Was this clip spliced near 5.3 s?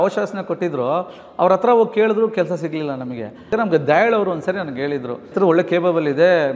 yes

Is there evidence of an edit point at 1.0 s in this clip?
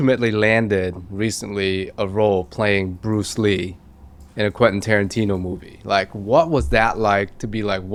no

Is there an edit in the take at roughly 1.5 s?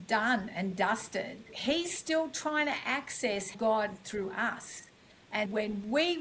yes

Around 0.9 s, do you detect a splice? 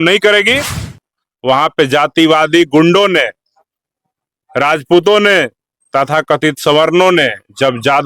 yes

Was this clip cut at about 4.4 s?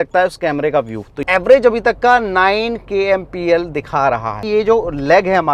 yes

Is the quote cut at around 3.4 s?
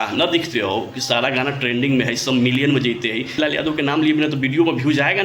yes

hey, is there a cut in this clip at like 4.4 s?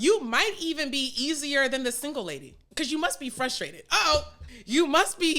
yes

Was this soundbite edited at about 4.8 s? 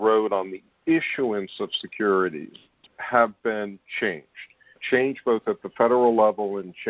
yes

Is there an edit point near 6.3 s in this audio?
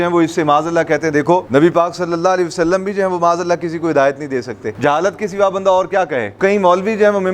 yes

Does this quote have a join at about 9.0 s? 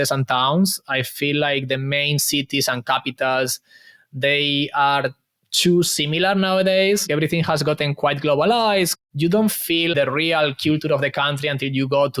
yes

